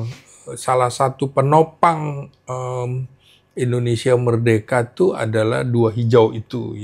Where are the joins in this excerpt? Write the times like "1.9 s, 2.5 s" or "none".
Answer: none